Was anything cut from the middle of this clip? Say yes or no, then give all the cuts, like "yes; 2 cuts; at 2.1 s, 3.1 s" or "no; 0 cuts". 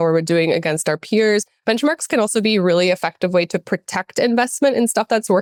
no; 0 cuts